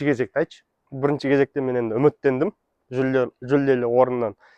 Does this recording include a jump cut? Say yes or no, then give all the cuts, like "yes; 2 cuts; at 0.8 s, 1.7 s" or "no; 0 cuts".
no; 0 cuts